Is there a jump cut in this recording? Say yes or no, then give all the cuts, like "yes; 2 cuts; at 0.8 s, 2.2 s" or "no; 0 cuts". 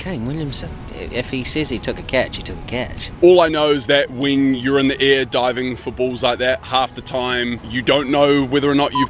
yes; 4 cuts; at 0.8 s, 3.0 s, 6.6 s, 7.7 s